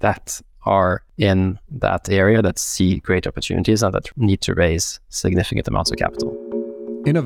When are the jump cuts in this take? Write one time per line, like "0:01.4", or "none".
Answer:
0:01.1
0:04.1
0:06.5